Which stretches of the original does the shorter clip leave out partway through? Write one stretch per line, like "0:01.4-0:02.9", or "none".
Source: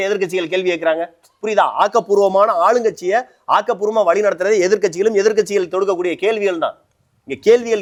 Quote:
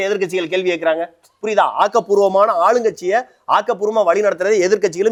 none